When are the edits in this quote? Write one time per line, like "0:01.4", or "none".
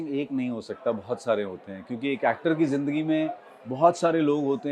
none